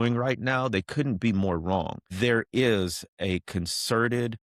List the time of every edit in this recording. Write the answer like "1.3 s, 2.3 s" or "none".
2.0 s